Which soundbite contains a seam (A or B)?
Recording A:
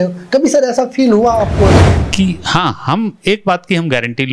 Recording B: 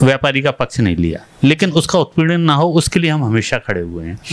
A